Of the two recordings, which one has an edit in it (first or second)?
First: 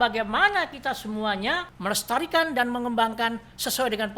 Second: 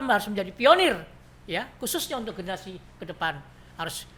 first